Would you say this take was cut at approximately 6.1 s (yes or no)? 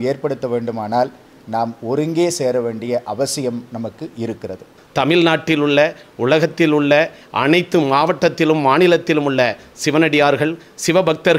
no